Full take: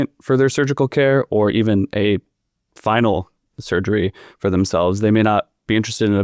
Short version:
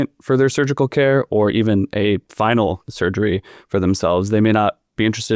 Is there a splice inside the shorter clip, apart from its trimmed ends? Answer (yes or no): yes